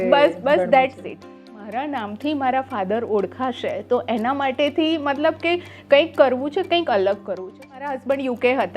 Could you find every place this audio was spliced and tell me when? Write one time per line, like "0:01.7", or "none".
0:01.5
0:07.9